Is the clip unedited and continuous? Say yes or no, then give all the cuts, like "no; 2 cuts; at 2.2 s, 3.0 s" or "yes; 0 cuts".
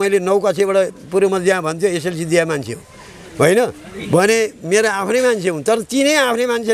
yes; 0 cuts